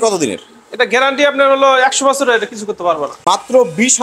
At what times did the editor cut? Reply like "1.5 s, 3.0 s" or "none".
3.1 s